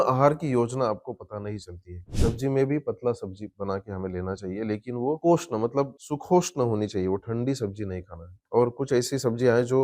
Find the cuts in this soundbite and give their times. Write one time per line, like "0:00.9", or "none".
0:02.1